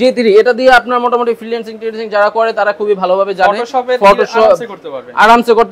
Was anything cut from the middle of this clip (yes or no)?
no